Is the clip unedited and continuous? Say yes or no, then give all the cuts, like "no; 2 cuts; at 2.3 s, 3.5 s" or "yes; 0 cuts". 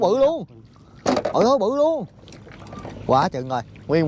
yes; 0 cuts